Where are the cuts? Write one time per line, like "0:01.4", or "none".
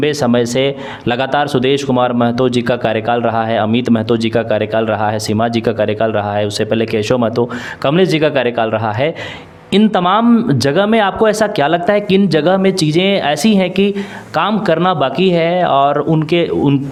none